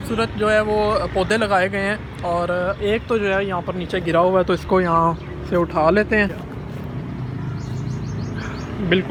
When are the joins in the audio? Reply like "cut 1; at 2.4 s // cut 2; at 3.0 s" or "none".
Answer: none

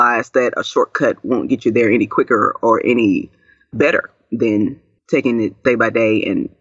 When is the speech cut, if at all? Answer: cut 1; at 5.3 s

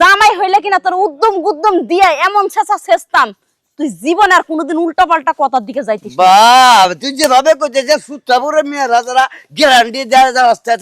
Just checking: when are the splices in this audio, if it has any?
none

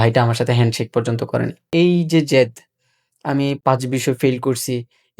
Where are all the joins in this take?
cut 1; at 1.7 s // cut 2; at 3.6 s

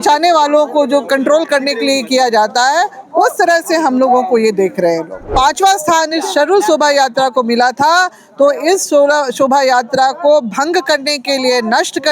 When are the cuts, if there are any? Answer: cut 1; at 5.3 s

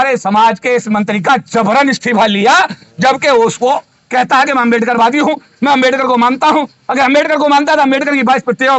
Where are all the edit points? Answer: none

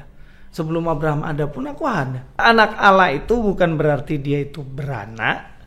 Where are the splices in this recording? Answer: cut 1; at 2.4 s

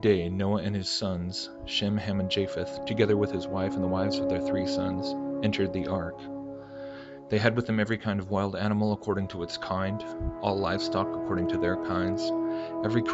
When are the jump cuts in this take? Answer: none

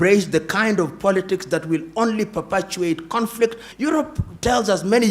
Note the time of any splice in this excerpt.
cut 1; at 3.7 s

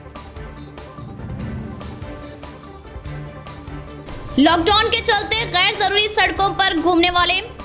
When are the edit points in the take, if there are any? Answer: cut 1; at 4.0 s

